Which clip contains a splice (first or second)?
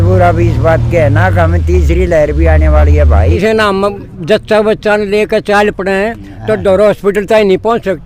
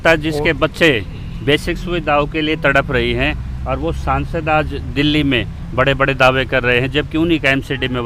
first